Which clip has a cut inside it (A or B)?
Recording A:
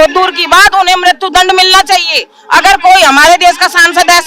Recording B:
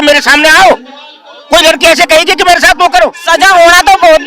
B